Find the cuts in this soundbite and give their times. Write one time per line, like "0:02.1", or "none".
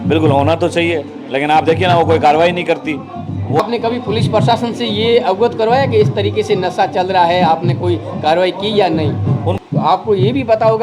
0:03.6
0:09.5